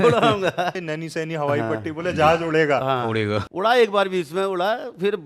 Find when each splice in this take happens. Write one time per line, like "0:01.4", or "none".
0:00.9
0:03.4

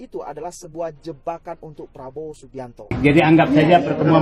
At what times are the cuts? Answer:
0:02.9

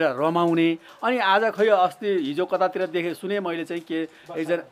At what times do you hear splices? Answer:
none

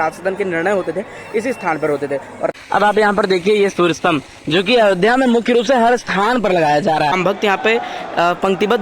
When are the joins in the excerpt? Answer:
0:02.5
0:07.1

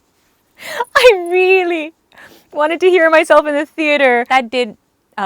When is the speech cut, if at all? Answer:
0:04.3

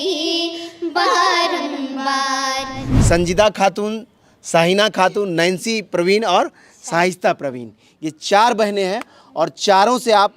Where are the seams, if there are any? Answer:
0:02.9

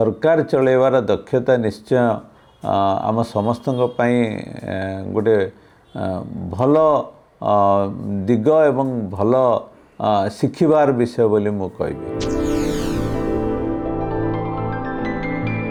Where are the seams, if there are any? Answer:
none

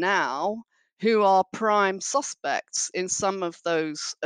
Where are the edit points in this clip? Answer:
none

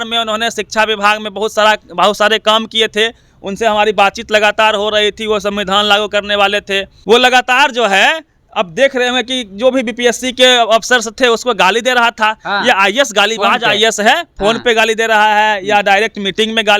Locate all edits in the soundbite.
0:06.9

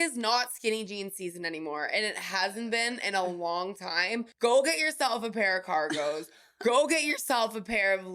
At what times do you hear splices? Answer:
0:04.3

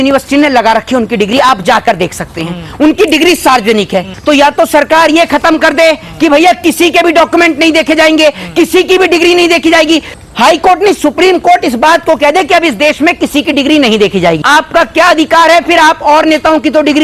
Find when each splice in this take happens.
0:04.1
0:14.4

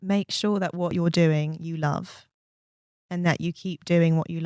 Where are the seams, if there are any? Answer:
0:00.9

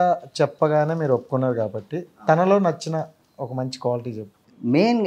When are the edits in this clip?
none

